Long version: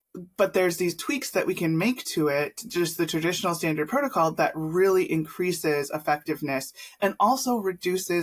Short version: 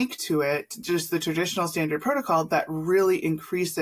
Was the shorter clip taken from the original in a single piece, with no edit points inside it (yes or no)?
yes